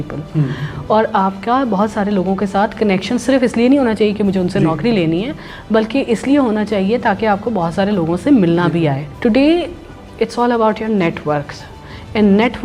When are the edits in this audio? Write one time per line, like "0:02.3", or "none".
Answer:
0:09.1